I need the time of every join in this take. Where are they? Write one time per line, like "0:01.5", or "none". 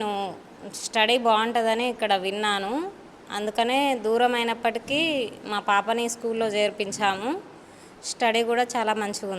none